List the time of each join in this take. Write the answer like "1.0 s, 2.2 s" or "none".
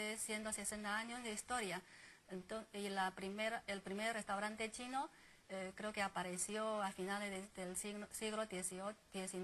6.3 s